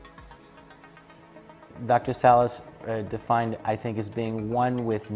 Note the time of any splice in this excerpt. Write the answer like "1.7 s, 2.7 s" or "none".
none